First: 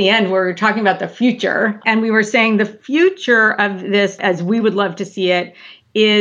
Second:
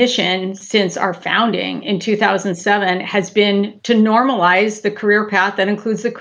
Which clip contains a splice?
first; 1 cut; at 1.8 s

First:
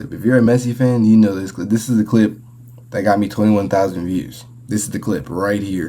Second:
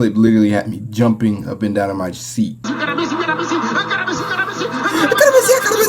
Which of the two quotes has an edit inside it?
second; 1 cut; at 2.6 s

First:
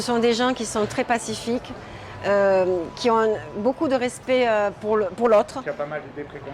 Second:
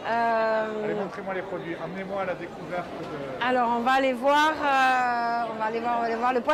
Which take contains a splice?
first; 1 cut; at 5.6 s

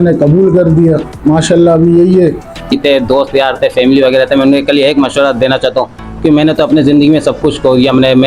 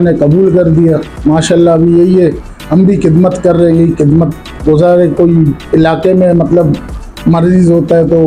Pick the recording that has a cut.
first; 1 cut; at 2.6 s

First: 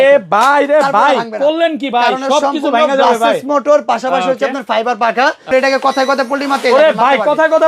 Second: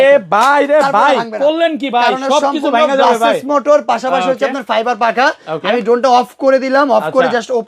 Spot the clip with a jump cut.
first; 1 cut; at 5.5 s

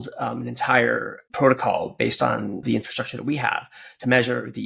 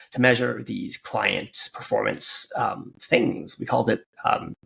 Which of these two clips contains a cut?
first; 2 cuts; at 1.2 s, 2.6 s

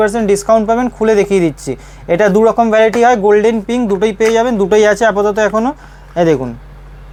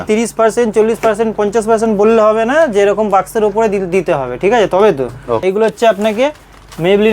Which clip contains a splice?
second; 1 cut; at 5.4 s

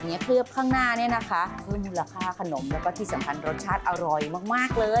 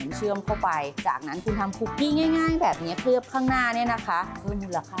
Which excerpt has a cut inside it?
second; 1 cut; at 0.9 s

